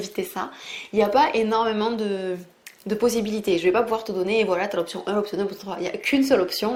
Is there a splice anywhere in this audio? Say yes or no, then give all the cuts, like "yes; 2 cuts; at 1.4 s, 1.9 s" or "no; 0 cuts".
no; 0 cuts